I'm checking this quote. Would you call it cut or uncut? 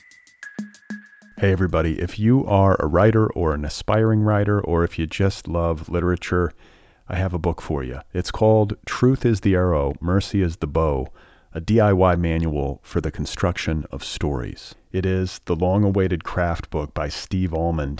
cut